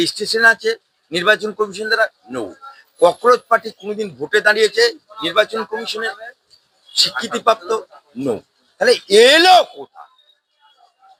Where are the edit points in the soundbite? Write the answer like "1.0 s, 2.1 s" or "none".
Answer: none

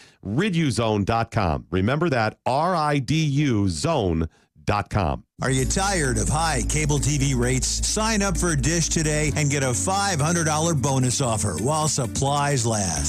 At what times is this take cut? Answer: 5.3 s

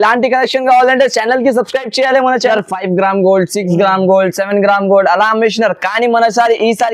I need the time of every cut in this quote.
2.5 s

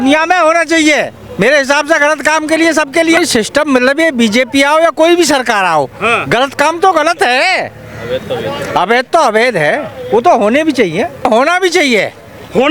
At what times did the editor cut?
3.2 s, 11.2 s

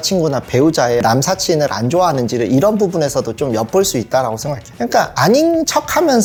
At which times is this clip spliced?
none

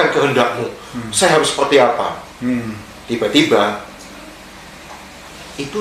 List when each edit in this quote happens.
none

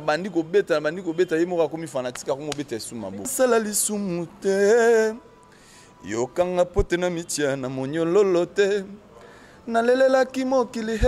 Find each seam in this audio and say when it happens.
3.3 s

